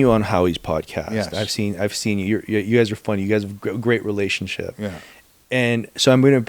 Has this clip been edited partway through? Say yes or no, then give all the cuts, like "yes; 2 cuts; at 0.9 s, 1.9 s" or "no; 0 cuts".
no; 0 cuts